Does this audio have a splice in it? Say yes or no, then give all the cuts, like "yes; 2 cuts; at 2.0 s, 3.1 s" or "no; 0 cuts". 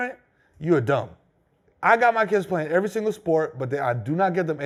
no; 0 cuts